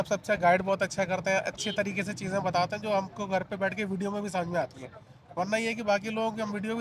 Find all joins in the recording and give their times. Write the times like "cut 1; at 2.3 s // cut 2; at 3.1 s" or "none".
none